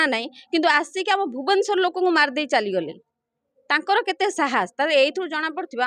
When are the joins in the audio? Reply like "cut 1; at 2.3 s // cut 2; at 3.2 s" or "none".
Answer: none